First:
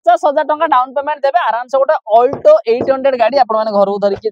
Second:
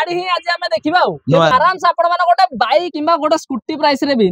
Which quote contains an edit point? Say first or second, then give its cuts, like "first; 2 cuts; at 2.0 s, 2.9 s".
second; 2 cuts; at 1.5 s, 2.9 s